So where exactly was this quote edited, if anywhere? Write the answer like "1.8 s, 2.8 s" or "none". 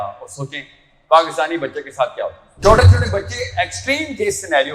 2.4 s